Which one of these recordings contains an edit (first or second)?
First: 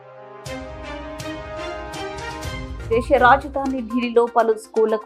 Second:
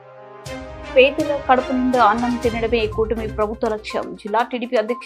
second